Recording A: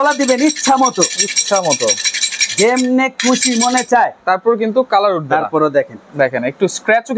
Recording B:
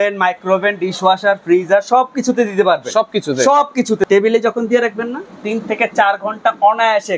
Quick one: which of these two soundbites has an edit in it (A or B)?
B